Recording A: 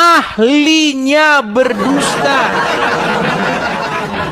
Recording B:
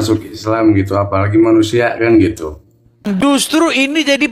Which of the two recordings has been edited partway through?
B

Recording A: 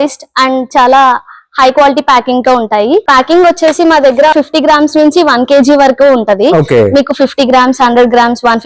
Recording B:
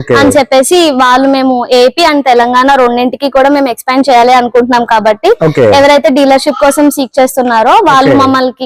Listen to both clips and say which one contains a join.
A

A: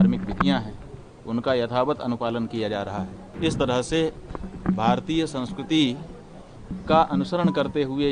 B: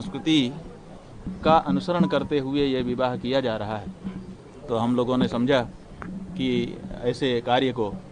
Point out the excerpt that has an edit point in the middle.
A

